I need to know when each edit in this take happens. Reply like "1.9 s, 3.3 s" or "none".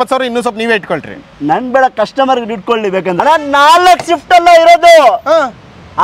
3.2 s